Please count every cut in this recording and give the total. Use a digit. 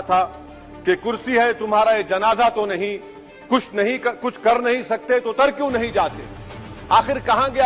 0